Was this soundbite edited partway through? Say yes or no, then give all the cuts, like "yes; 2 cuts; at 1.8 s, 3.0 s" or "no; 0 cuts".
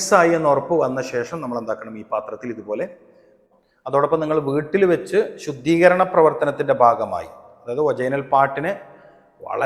yes; 1 cut; at 3.4 s